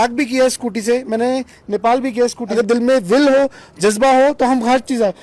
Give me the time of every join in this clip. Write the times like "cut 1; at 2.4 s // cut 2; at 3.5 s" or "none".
cut 1; at 2.4 s